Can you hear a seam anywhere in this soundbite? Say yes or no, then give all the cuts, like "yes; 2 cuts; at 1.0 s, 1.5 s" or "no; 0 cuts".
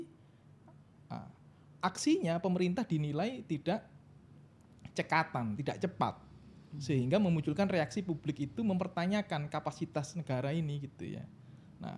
no; 0 cuts